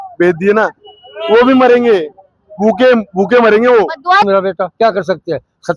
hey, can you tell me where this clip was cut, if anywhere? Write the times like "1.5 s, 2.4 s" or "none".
4.2 s

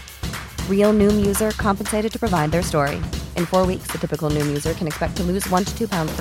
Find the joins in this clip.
none

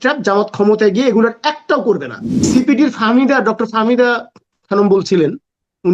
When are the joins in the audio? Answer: 2.4 s

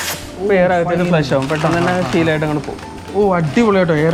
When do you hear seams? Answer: none

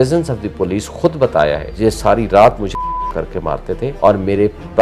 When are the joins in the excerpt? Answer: 1.7 s, 3.9 s

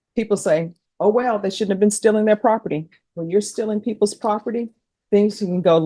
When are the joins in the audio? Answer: 3.1 s

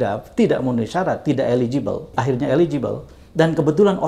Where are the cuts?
2.1 s

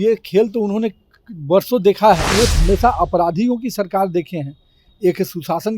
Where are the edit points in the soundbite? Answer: 2.3 s

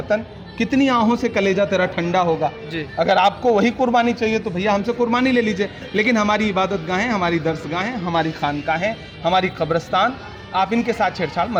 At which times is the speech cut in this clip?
none

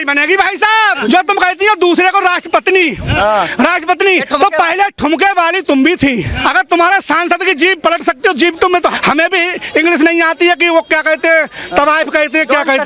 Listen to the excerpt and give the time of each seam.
1.0 s, 6.3 s, 8.9 s

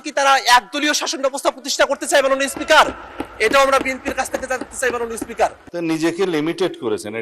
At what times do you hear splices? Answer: 5.6 s

